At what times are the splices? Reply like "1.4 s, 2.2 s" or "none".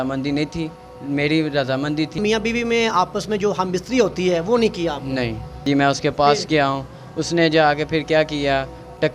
2.2 s, 5.6 s